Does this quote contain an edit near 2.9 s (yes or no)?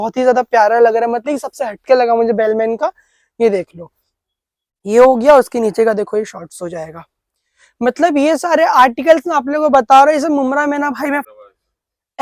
no